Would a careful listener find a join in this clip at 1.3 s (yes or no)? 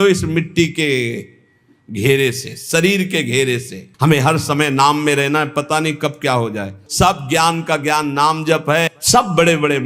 no